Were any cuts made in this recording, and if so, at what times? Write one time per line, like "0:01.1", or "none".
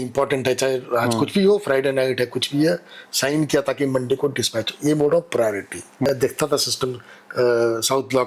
0:06.1